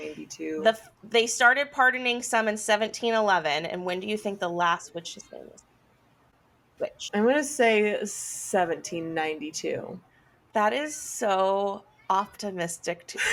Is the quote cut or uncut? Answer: uncut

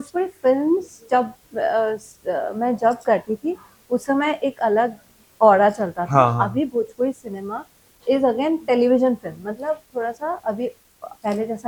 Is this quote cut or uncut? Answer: uncut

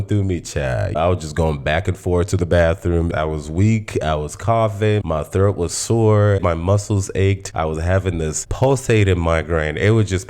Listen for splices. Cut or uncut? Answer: cut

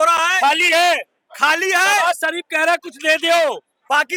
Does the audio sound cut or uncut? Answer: uncut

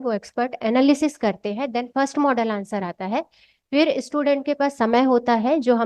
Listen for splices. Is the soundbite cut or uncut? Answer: uncut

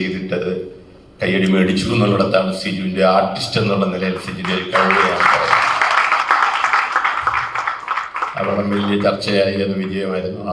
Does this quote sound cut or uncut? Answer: uncut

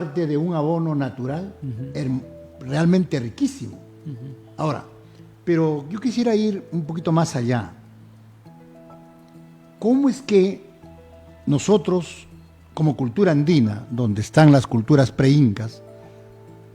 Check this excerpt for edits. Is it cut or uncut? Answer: uncut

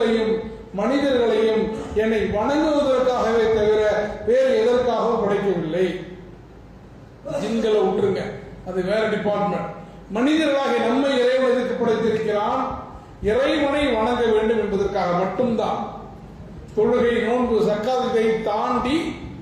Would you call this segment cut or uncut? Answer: uncut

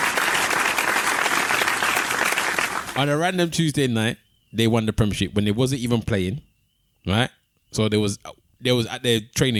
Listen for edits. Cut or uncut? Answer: uncut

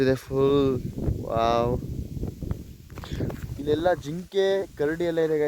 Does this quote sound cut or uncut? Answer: uncut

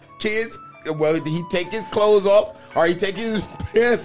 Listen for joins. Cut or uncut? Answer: uncut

